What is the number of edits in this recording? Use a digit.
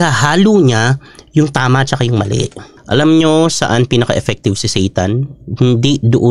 1